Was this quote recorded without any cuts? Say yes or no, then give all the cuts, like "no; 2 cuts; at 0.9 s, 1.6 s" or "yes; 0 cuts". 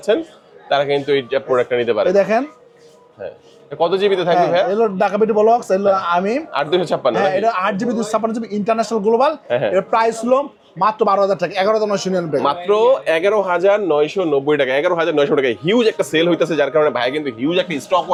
yes; 0 cuts